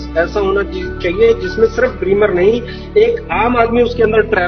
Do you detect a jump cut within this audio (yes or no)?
no